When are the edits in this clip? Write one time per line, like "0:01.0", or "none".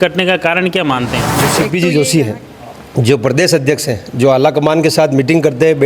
0:01.5